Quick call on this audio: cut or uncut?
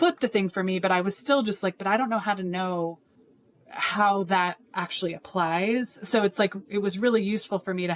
uncut